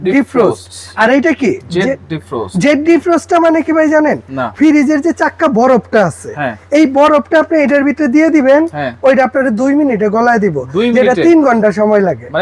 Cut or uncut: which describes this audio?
uncut